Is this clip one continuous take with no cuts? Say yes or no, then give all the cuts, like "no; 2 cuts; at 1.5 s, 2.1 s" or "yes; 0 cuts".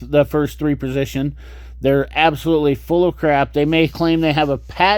yes; 0 cuts